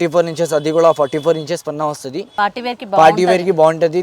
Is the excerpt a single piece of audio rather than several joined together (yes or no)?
no